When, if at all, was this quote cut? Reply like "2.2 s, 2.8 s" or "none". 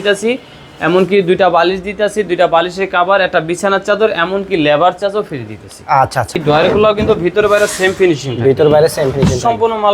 6.4 s